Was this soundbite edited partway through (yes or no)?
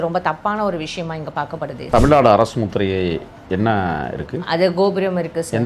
yes